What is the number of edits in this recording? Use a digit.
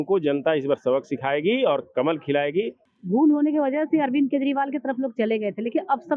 1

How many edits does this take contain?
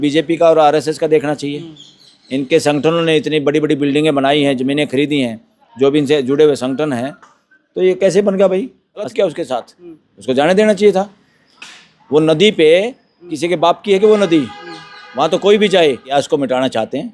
2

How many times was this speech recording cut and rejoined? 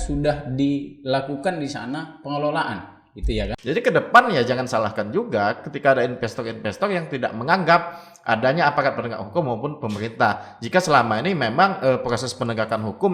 1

